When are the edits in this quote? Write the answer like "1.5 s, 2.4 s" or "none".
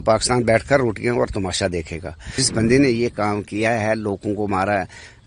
2.4 s